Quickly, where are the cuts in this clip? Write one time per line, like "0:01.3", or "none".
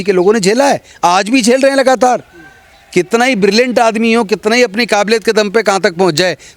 none